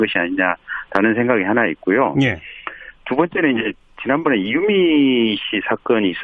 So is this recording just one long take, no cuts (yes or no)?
no